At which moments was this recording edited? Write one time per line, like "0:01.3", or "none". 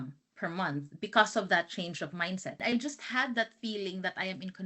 0:02.6

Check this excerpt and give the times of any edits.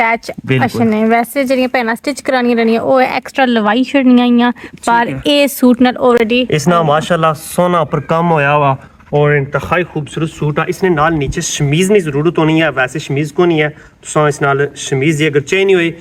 none

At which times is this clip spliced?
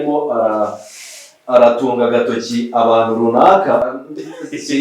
0:03.9

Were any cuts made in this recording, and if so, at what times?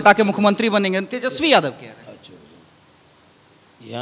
none

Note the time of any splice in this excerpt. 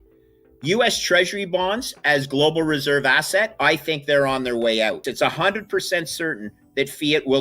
0:05.0

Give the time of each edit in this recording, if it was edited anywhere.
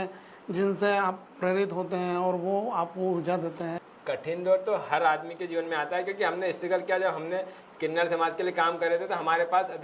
0:03.8

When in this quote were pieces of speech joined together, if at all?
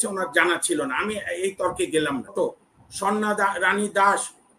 0:02.3

